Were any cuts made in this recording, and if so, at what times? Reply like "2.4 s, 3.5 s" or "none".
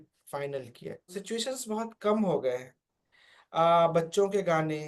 1.2 s